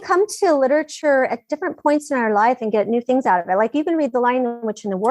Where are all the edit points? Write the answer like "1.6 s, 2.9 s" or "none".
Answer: 0.9 s